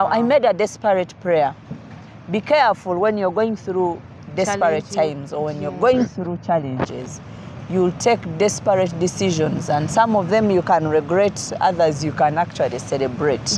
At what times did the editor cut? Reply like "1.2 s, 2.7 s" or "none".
none